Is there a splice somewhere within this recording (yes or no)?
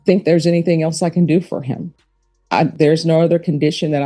no